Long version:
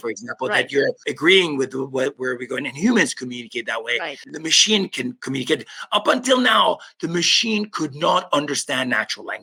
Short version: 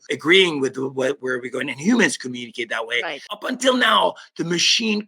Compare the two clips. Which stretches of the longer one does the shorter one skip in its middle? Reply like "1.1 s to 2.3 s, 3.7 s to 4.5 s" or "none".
4.4 s to 6.1 s

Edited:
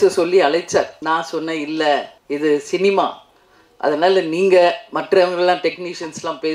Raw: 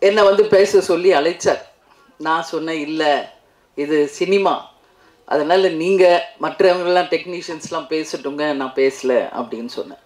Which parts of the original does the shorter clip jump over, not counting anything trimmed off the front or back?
1.7 s to 2.2 s, 3.4 s to 3.6 s

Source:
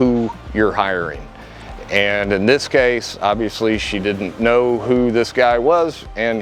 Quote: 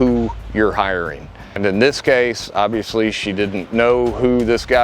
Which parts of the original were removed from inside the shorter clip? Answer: 1.6 s to 2.2 s

